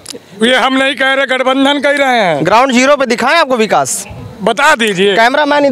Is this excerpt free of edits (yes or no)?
yes